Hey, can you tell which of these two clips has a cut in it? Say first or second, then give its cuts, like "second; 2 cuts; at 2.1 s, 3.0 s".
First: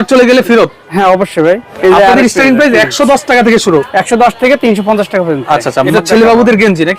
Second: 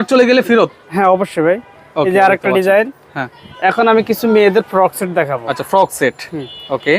first; 2 cuts; at 1.7 s, 5.9 s